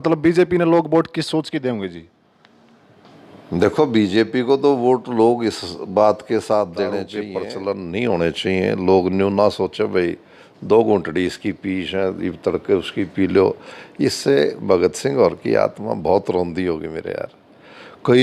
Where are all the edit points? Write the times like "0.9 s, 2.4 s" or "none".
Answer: 7.3 s